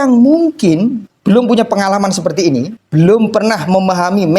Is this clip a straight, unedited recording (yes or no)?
no